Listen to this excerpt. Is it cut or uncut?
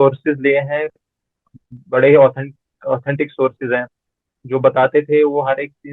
uncut